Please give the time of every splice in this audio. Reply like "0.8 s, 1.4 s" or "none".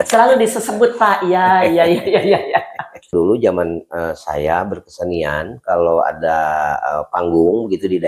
3.1 s